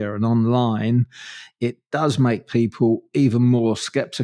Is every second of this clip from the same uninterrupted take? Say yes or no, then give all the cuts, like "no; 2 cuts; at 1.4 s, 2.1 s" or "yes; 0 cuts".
yes; 0 cuts